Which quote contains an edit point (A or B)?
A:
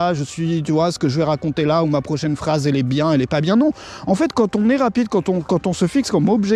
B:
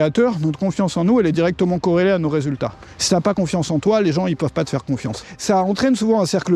B